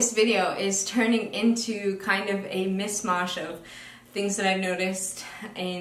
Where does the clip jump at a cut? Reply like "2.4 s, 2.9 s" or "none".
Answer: none